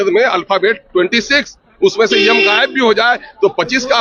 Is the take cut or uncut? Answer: uncut